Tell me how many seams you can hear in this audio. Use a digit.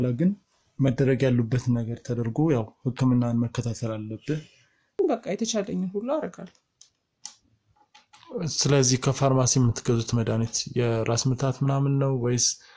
1